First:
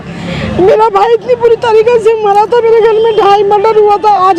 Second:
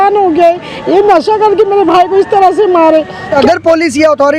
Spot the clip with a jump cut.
second; 1 cut; at 3.4 s

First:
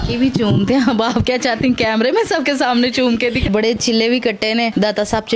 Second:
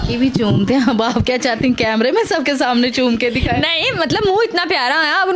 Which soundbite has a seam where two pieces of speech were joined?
first; 1 cut; at 3.5 s

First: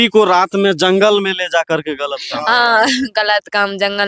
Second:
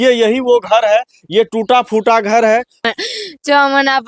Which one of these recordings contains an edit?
second; 1 cut; at 2.8 s

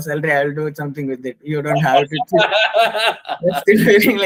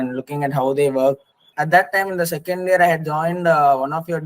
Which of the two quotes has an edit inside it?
second; 1 cut; at 1.5 s

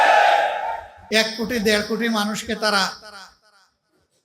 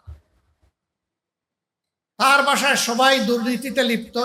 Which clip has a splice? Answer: first; 1 cut; at 0.9 s

